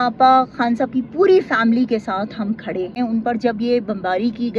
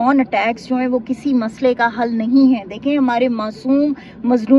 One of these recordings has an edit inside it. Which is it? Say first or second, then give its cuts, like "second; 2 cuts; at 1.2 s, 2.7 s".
first; 1 cut; at 3.0 s